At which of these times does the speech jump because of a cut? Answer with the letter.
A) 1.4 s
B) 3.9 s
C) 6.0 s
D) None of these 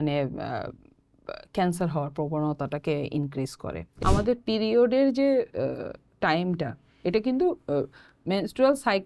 B